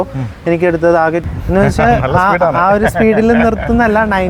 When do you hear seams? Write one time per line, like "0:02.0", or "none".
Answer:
0:01.2

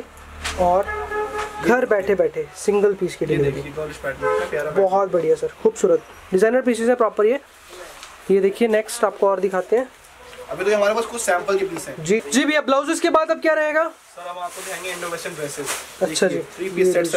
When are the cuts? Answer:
0:12.2

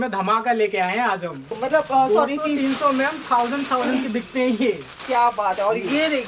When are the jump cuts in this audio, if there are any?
0:01.5

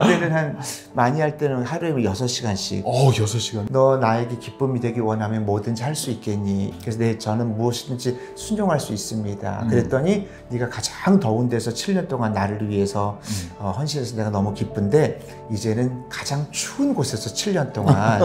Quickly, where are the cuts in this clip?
0:03.7
0:06.7
0:10.4

